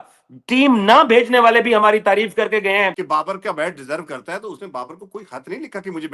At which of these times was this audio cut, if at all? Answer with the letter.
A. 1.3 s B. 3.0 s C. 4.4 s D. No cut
B